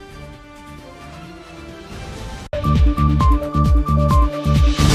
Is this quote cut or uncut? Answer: cut